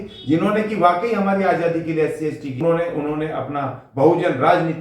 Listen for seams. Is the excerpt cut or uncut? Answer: cut